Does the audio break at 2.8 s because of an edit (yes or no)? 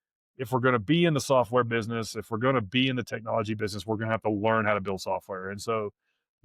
no